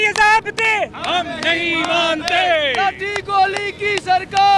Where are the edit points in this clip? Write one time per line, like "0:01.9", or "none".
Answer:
none